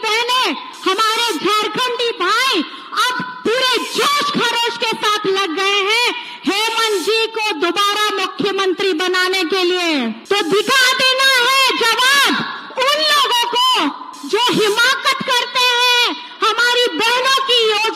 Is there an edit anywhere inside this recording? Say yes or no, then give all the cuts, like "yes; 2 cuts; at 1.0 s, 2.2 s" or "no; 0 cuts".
yes; 1 cut; at 10.2 s